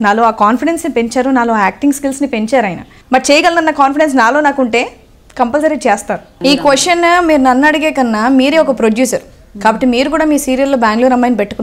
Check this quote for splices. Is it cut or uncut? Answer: cut